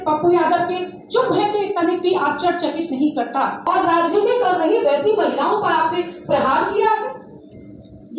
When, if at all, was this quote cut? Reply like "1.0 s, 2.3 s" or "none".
3.6 s